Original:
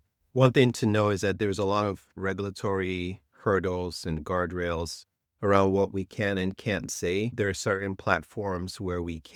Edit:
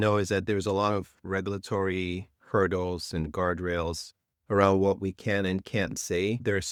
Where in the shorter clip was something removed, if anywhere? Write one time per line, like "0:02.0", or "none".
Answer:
none